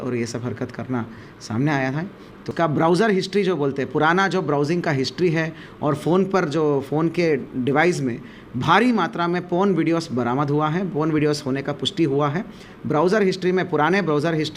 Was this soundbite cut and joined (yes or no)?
yes